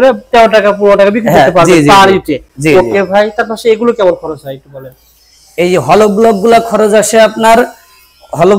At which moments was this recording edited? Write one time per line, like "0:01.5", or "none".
none